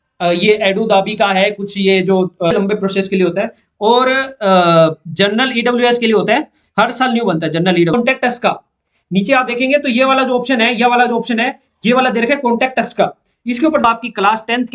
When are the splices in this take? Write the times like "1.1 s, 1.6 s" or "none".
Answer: 2.5 s, 7.9 s, 13.8 s